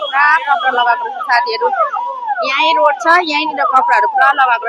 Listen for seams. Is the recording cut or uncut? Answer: uncut